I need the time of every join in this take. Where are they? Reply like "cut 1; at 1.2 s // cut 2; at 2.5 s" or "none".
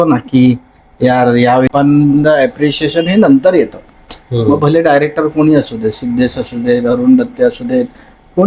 cut 1; at 1.7 s

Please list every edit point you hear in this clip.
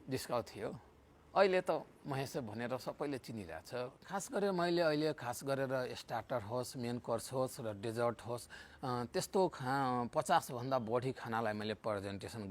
cut 1; at 4.1 s

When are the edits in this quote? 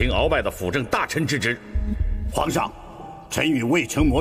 cut 1; at 1.8 s

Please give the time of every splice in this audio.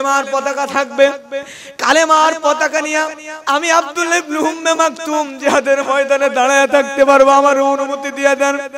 none

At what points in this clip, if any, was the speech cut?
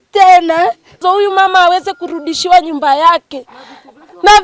cut 1; at 1.0 s

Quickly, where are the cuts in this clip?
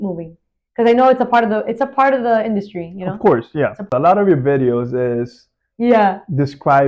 cut 1; at 3.8 s

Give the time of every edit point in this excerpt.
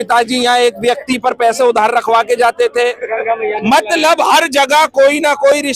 none

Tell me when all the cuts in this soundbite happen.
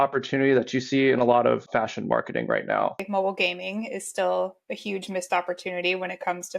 cut 1; at 1.7 s // cut 2; at 3.0 s

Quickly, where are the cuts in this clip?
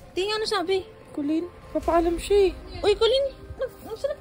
cut 1; at 1.6 s // cut 2; at 2.7 s

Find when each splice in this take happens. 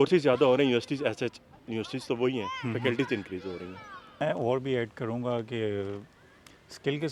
cut 1; at 4.1 s

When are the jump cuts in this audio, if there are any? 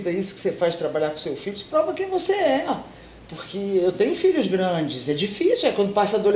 none

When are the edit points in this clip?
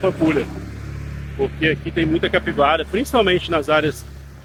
none

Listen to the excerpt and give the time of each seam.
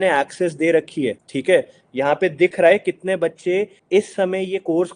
cut 1; at 1.3 s // cut 2; at 3.8 s

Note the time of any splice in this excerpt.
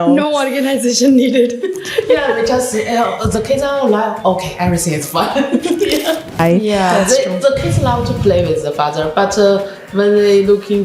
cut 1; at 6.4 s

